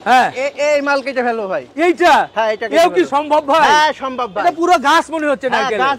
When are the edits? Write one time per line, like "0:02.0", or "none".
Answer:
none